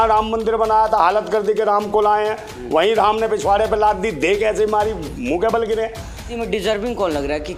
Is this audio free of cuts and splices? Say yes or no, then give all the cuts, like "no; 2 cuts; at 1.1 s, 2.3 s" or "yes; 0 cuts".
no; 1 cut; at 6.3 s